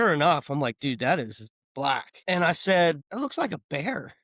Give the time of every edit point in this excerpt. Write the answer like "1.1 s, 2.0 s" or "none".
2.1 s, 3.0 s